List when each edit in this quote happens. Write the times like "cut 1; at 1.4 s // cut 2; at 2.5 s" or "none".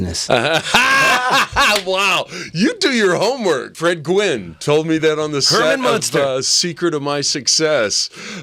cut 1; at 3.7 s